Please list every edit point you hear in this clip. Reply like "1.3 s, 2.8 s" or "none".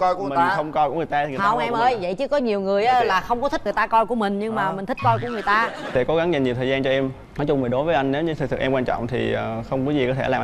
5.9 s